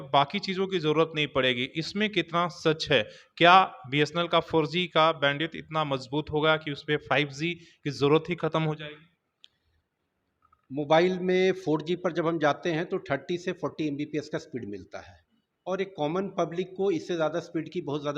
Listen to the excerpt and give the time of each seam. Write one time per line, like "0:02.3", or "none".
none